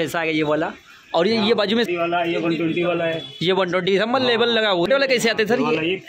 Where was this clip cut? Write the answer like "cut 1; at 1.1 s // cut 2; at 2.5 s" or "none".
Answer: cut 1; at 1.9 s // cut 2; at 4.9 s